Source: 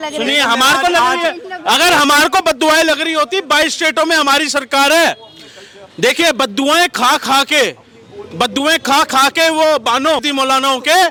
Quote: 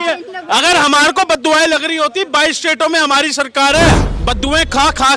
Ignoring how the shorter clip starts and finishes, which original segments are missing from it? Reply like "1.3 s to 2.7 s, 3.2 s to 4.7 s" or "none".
5.3 s to 8.2 s